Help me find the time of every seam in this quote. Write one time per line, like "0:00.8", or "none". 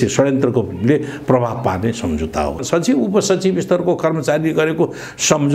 0:02.6